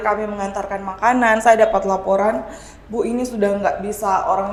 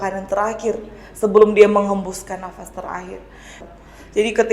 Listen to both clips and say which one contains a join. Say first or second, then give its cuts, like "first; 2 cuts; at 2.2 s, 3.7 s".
second; 1 cut; at 3.6 s